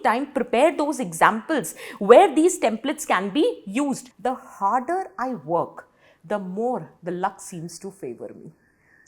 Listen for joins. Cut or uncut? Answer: cut